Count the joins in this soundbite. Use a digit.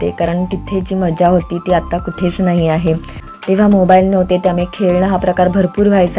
1